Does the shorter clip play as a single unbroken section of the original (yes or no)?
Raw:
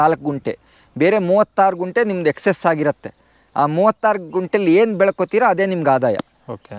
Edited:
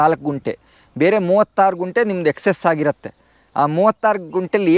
yes